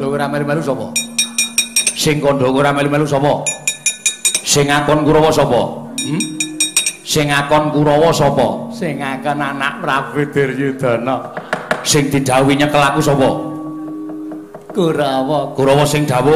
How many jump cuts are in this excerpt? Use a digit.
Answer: 1